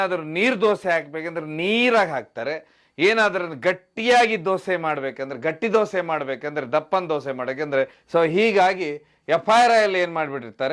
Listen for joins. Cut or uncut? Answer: cut